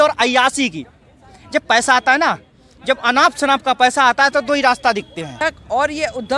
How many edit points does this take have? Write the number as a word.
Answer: one